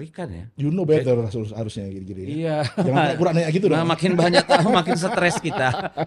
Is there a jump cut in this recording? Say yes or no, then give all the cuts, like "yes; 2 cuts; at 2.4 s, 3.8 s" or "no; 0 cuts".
no; 0 cuts